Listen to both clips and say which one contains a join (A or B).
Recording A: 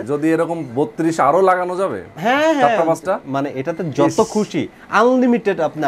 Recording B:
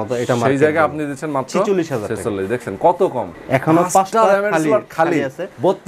B